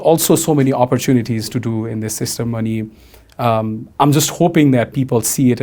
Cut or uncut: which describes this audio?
uncut